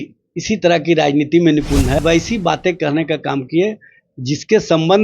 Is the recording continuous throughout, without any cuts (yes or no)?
no